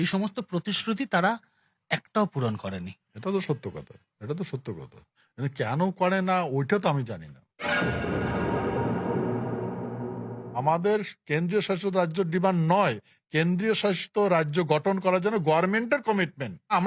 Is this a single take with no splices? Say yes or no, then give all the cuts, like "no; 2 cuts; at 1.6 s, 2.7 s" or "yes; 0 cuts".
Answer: yes; 0 cuts